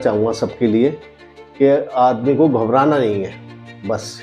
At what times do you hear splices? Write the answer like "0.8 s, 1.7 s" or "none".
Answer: none

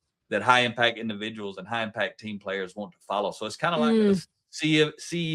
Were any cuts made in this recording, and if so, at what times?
3.7 s

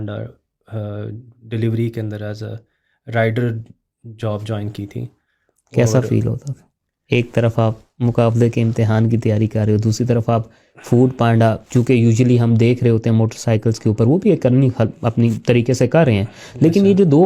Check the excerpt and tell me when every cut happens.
none

